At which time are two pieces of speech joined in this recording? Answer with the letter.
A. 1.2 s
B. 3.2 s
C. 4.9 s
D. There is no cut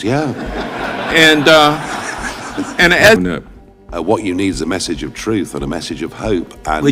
B